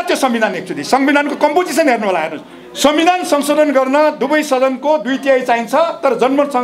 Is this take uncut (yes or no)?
yes